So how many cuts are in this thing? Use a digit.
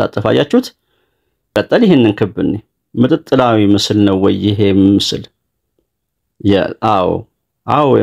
1